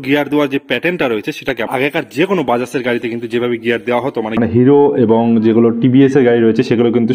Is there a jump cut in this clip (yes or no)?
yes